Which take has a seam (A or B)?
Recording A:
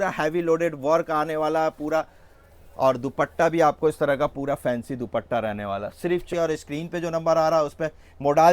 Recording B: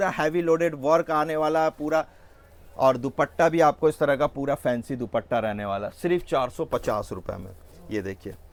A